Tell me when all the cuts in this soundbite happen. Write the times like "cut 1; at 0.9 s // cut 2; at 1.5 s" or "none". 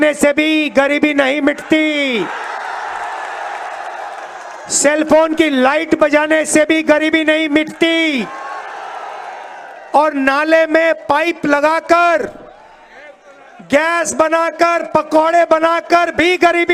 none